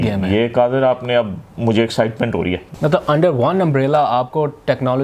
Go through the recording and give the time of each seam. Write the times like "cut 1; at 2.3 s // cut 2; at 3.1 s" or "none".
cut 1; at 2.7 s